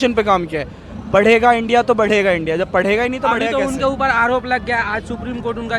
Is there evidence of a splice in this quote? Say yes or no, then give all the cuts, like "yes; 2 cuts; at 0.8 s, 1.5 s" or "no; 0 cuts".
no; 0 cuts